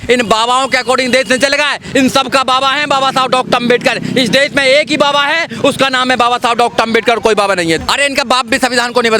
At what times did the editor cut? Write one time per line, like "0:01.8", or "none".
0:07.8